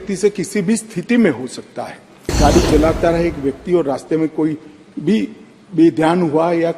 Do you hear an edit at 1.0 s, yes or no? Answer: no